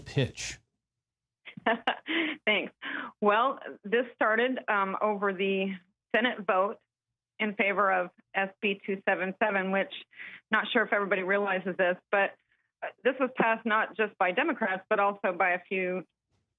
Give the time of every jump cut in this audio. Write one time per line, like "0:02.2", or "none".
0:12.2